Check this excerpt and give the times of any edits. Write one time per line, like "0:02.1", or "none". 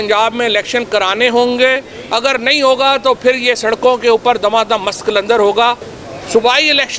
0:05.9